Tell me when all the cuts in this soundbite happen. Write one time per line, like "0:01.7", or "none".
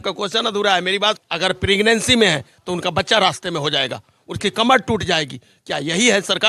0:01.2